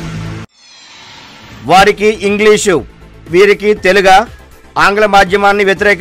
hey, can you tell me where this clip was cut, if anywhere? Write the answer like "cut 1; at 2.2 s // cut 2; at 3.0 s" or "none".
cut 1; at 1.2 s